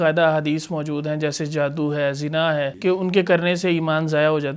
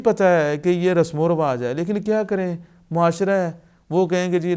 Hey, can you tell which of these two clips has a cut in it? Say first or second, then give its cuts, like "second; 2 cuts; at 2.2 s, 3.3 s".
first; 1 cut; at 2.7 s